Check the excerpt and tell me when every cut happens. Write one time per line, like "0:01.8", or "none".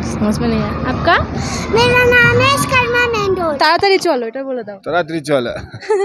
0:03.6